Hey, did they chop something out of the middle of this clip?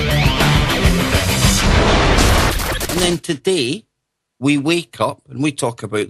no; 0 cuts

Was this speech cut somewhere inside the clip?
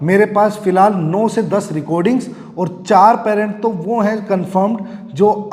no; 0 cuts

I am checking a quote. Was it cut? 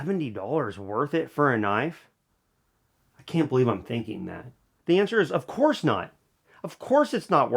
yes; 1 cut; at 4.7 s

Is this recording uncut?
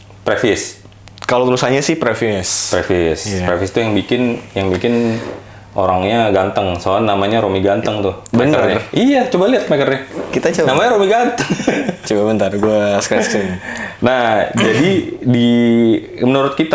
yes; 0 cuts

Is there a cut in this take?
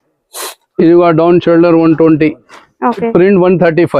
yes; 1 cut; at 3.1 s

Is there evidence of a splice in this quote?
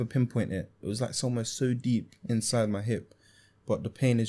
no; 0 cuts

